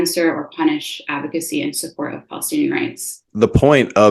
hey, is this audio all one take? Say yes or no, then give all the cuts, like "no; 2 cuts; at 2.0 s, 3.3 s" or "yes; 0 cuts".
no; 1 cut; at 3.2 s